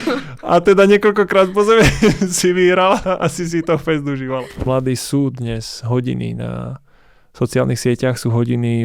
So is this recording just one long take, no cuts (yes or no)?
no